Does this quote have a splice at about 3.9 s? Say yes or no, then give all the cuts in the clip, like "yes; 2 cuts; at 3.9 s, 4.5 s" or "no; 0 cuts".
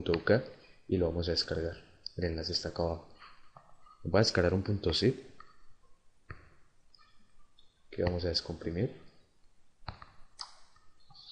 no; 1 cut; at 8.7 s